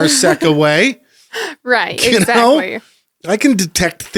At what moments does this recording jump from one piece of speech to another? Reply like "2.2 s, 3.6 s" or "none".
none